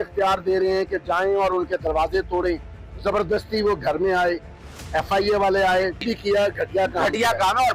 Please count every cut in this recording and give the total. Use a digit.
1